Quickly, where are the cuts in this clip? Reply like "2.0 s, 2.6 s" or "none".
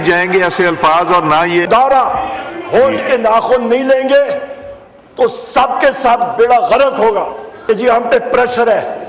1.7 s, 7.5 s